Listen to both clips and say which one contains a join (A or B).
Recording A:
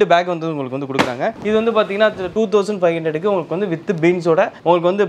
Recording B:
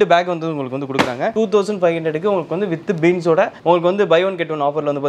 B